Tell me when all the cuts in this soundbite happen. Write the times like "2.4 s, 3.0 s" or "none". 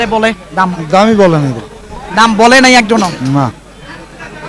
none